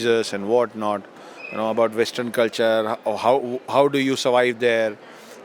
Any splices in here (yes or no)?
no